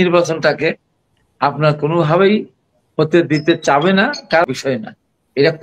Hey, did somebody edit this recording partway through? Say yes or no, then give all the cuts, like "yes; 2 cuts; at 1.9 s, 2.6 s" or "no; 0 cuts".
yes; 1 cut; at 4.4 s